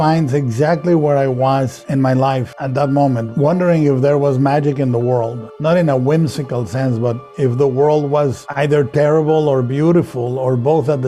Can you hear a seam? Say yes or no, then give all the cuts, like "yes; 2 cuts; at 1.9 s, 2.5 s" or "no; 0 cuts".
no; 0 cuts